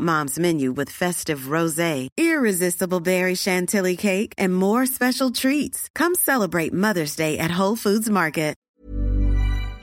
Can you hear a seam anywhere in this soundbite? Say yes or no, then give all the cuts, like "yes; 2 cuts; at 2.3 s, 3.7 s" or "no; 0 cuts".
yes; 1 cut; at 8.6 s